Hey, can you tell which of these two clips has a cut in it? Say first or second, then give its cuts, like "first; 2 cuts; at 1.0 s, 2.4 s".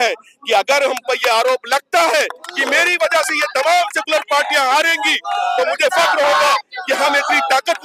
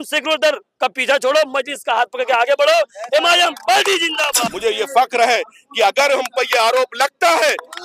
second; 1 cut; at 4.4 s